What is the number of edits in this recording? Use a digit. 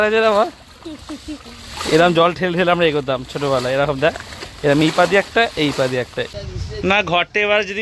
1